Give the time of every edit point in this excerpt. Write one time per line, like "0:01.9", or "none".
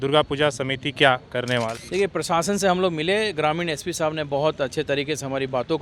0:01.8